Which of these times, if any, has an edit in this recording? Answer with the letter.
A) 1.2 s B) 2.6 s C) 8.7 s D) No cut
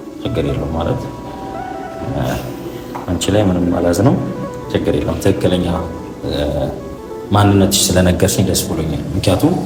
D